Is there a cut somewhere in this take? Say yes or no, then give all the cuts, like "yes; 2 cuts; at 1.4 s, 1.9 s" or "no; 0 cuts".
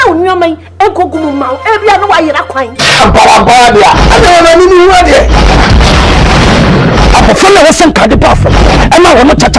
no; 0 cuts